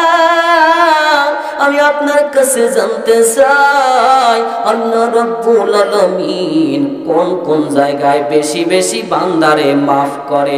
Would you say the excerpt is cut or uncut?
uncut